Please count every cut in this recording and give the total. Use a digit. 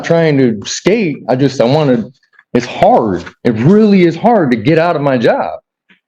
0